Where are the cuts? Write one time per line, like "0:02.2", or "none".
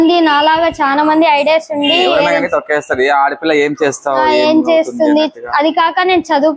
0:02.2